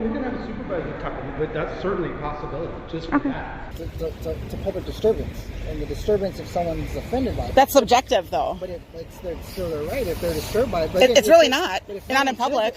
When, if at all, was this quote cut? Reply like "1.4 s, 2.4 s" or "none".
3.7 s